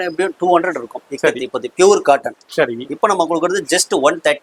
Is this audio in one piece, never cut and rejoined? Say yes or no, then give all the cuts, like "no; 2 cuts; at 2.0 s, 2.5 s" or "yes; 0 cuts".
yes; 0 cuts